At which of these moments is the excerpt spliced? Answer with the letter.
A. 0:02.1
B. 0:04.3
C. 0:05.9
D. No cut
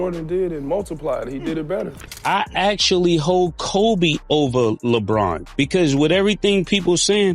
A